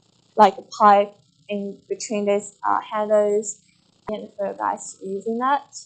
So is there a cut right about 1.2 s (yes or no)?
no